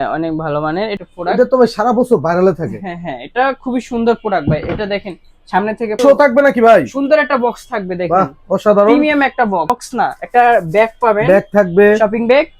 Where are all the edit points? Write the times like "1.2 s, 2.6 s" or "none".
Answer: 1.0 s, 6.0 s